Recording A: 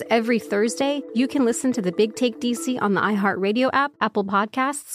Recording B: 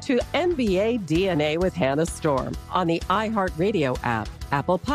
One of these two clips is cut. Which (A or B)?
A